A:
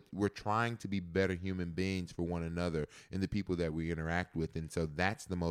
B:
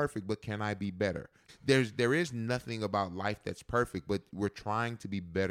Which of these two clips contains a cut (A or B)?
B